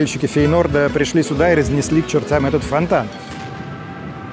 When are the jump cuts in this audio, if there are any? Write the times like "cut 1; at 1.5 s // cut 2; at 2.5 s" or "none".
none

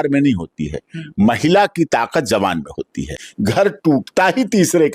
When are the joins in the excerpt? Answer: cut 1; at 3.2 s

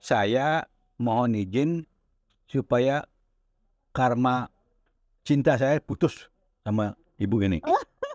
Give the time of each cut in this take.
none

